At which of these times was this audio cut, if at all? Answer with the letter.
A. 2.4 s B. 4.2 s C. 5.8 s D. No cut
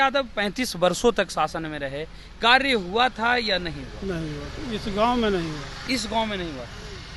D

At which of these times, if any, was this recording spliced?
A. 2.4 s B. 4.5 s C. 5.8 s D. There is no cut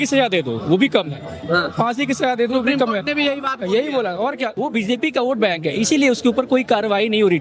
B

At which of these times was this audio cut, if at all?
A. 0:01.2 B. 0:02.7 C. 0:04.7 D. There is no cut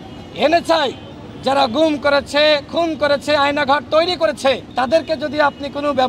C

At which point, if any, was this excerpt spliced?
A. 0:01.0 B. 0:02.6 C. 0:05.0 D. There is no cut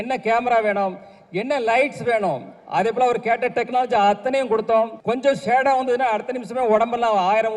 C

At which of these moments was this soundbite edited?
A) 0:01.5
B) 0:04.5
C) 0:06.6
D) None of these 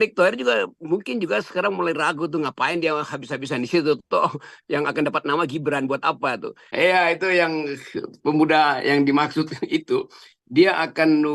C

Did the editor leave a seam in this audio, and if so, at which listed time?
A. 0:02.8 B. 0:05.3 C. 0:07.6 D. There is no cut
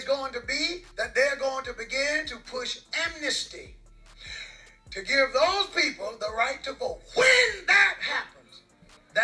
C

